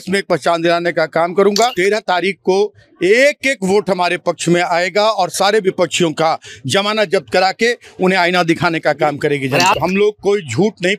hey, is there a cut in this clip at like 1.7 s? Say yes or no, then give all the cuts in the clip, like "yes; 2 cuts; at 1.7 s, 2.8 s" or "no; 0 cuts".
yes; 2 cuts; at 1.7 s, 9.8 s